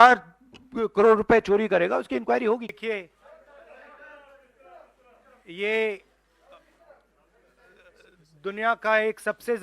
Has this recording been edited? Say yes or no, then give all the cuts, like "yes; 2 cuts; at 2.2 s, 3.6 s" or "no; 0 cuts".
yes; 1 cut; at 2.7 s